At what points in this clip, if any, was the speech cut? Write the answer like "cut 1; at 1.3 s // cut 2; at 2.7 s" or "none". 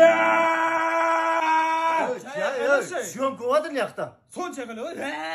none